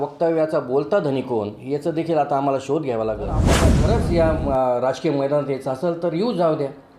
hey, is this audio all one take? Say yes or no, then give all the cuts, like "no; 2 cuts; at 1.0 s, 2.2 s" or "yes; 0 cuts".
no; 1 cut; at 3.7 s